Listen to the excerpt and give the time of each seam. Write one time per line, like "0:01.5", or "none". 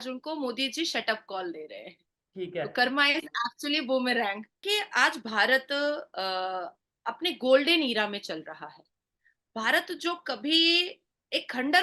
0:04.5